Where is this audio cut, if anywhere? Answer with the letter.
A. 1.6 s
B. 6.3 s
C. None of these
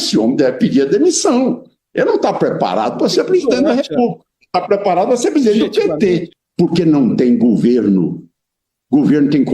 B